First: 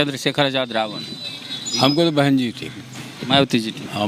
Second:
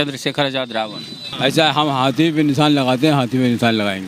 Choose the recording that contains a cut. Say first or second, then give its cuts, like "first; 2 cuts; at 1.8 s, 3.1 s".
second; 1 cut; at 1.3 s